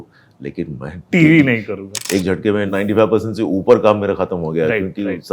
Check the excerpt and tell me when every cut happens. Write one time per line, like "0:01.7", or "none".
0:01.0
0:02.2